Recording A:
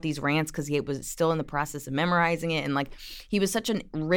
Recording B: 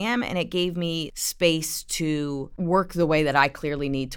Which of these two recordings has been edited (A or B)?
B